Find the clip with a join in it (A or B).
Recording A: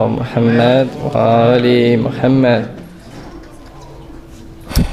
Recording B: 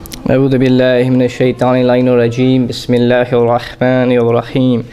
A